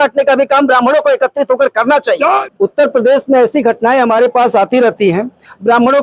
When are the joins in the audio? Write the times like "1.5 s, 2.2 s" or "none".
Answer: 2.5 s